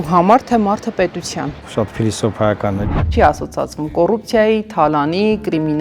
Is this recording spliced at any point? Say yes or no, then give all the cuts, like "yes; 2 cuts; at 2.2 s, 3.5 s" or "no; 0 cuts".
yes; 2 cuts; at 1.6 s, 3.0 s